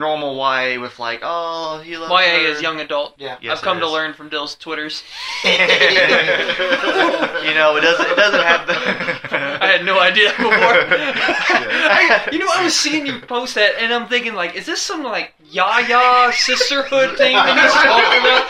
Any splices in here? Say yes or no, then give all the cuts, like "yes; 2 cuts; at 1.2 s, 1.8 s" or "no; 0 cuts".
yes; 1 cut; at 3.3 s